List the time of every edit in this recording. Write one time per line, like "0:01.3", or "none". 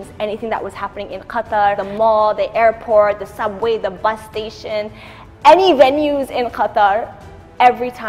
0:01.8